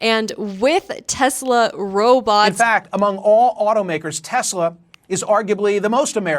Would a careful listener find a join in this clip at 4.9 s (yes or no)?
no